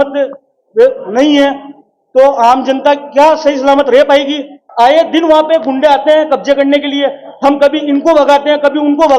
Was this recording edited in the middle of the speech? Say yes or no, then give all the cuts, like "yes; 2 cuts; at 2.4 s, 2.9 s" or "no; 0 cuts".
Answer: yes; 1 cut; at 4.6 s